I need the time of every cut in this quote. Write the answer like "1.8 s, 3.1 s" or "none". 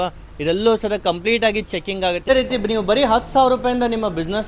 2.2 s